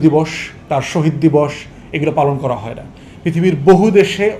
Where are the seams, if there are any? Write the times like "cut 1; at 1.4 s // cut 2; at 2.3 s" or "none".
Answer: none